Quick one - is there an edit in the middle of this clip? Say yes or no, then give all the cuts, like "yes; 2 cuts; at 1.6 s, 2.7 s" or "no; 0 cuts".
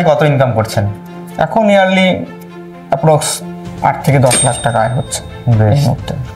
no; 0 cuts